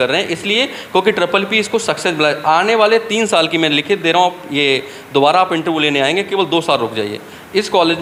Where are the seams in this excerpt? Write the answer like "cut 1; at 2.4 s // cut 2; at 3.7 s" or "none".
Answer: none